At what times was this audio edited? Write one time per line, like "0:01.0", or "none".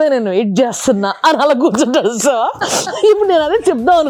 none

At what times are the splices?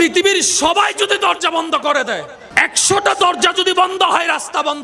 0:02.4

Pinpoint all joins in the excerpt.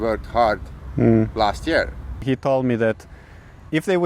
0:02.2

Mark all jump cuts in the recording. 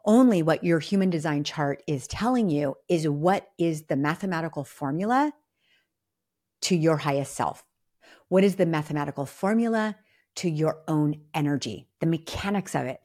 none

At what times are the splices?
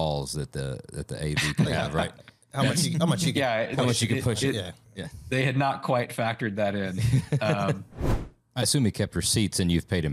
0:08.3

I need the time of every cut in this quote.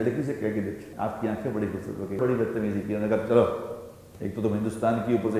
0:00.9
0:02.2

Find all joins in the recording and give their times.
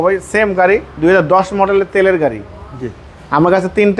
none

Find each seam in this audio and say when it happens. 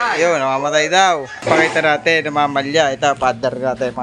0:01.5

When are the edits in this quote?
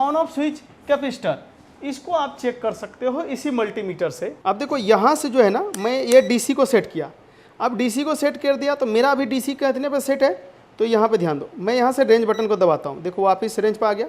0:04.3

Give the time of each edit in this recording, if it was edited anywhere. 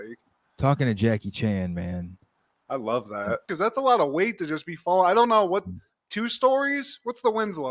0:03.5

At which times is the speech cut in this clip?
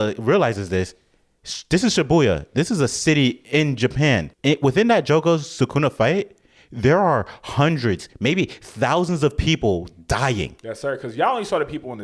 0:04.3

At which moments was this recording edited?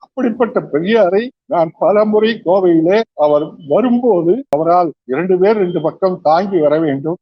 0:04.6

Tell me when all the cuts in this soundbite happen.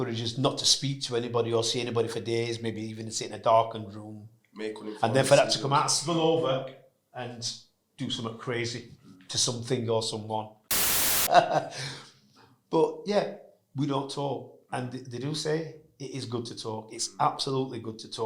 0:11.1

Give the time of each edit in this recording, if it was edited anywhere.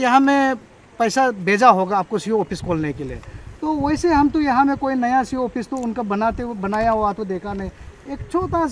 none

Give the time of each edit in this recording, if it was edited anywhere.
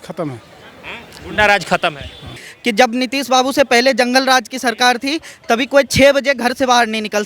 0:02.5

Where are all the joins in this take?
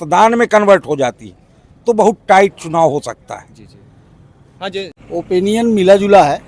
0:05.0

